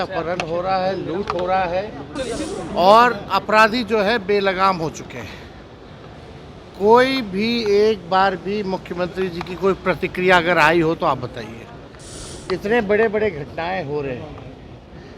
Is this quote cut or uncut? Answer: cut